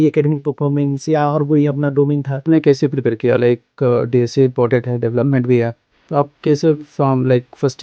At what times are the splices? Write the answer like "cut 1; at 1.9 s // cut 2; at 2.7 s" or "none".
cut 1; at 2.5 s